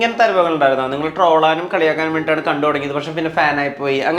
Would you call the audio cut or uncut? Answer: uncut